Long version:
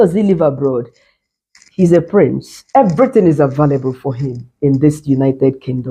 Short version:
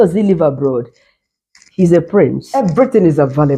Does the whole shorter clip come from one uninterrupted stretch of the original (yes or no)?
no